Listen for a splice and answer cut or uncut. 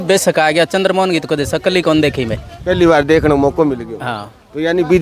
uncut